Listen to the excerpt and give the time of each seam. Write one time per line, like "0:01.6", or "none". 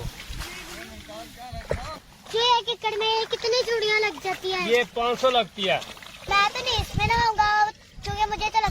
0:02.3
0:06.2